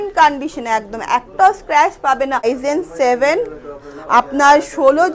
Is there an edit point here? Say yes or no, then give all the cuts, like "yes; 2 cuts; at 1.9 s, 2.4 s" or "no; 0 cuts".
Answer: yes; 1 cut; at 2.5 s